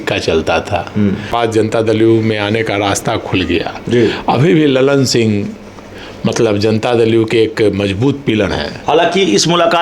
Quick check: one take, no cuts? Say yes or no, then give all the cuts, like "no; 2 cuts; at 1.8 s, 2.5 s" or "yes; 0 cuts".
no; 1 cut; at 1.3 s